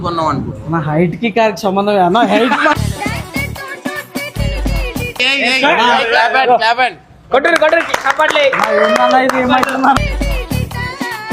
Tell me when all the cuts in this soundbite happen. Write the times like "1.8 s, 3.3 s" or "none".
5.2 s